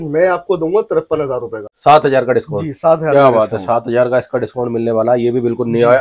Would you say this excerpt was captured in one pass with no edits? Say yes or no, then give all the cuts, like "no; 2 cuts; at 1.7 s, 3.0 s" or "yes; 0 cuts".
no; 1 cut; at 1.6 s